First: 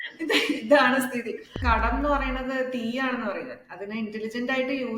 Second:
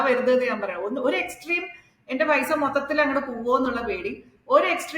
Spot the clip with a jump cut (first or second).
first